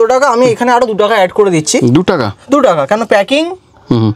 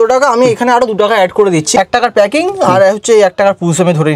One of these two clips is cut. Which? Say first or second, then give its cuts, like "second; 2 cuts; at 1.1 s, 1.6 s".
second; 1 cut; at 1.7 s